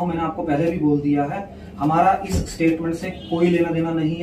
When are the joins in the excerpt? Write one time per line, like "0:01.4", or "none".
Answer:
none

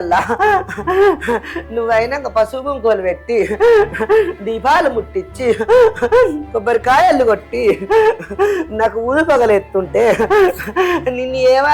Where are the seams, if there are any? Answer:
none

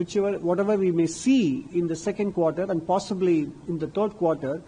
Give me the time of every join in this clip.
none

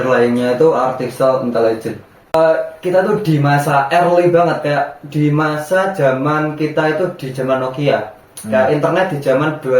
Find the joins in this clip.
0:02.3

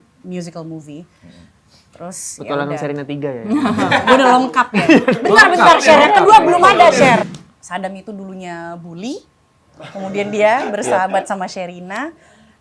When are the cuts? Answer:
0:07.2

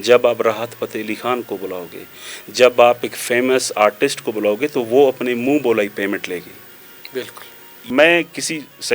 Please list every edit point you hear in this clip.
0:07.9

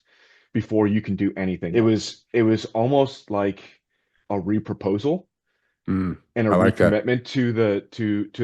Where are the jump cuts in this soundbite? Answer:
0:01.6

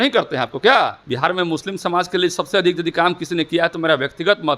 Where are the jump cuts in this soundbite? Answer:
0:01.0

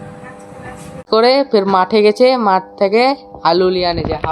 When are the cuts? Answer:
0:01.0

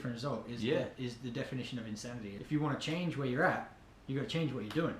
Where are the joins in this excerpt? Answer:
0:02.3

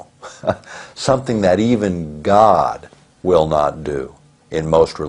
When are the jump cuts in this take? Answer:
none

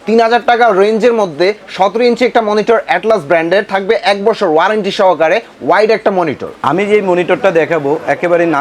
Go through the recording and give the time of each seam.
none

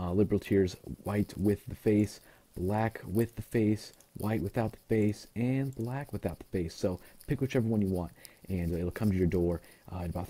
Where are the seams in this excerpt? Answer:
0:02.9

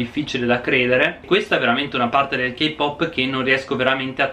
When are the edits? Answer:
0:01.1

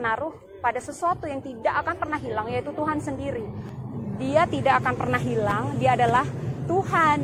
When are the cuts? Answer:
none

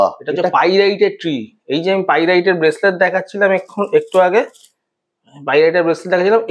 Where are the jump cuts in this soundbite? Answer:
none

